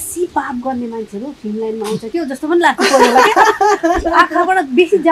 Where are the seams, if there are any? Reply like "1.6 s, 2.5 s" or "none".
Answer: none